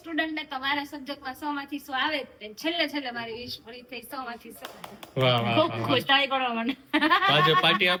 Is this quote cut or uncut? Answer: uncut